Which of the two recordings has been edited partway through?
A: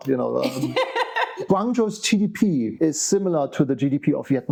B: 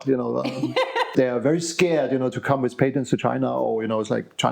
B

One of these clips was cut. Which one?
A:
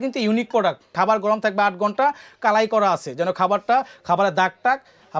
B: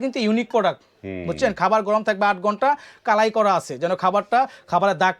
A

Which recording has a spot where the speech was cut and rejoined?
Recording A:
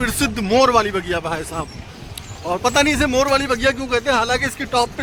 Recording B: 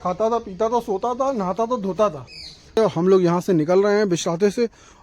B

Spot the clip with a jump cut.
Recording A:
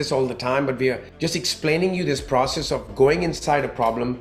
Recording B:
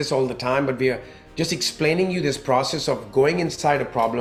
A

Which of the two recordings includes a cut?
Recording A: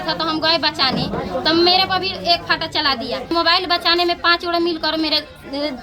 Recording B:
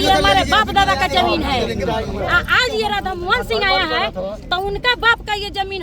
A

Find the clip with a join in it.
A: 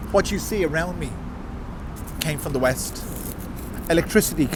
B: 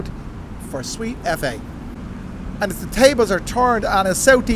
B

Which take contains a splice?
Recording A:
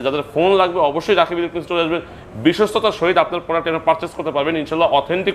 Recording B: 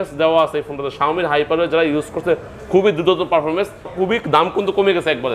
B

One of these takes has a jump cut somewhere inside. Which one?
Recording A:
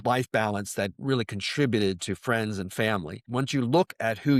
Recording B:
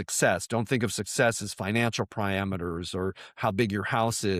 A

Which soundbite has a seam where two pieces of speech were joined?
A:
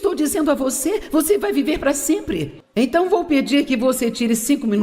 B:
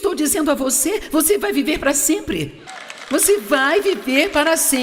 A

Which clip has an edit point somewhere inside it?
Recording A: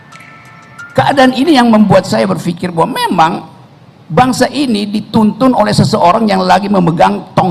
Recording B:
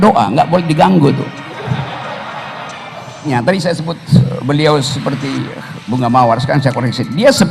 B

